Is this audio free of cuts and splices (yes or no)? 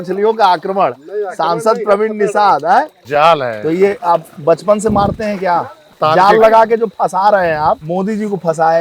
no